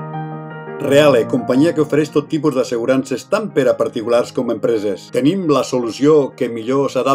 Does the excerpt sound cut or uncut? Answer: uncut